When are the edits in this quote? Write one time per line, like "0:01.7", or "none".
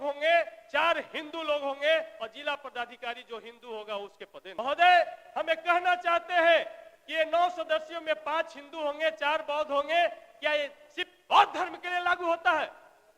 0:04.4